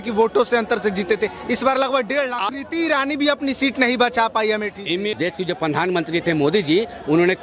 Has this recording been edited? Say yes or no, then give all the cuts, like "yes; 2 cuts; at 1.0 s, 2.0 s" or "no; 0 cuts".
yes; 2 cuts; at 2.5 s, 5.1 s